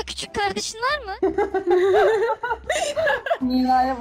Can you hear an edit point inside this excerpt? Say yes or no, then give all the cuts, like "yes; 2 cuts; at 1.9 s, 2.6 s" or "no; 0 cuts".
yes; 1 cut; at 1.2 s